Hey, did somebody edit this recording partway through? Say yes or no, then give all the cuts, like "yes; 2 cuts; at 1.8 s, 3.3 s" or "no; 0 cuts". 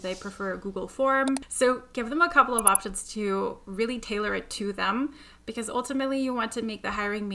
yes; 1 cut; at 1.5 s